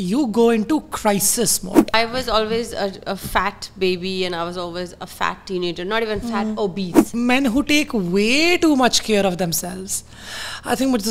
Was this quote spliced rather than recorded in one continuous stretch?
yes; 2 cuts; at 1.9 s, 7.1 s

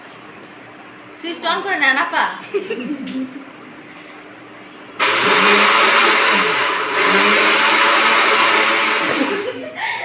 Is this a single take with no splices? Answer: no; 1 cut; at 9.0 s

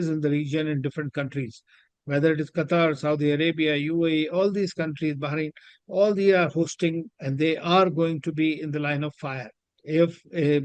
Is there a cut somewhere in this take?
no; 0 cuts

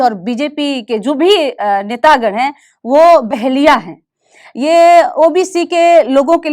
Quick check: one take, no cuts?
yes; 0 cuts

